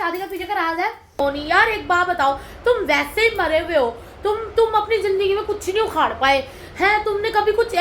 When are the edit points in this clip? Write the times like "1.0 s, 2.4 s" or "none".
1.2 s